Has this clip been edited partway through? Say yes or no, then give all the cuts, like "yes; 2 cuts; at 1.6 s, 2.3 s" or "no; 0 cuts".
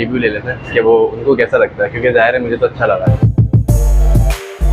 yes; 1 cut; at 3.4 s